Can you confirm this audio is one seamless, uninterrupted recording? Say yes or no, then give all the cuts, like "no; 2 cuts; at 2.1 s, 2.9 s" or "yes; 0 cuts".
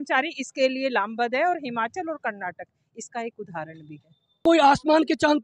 no; 1 cut; at 4.4 s